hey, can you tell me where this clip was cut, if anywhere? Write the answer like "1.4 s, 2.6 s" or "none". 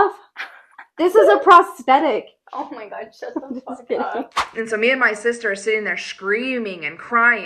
4.4 s